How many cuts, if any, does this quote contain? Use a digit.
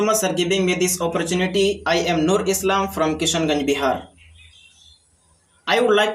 0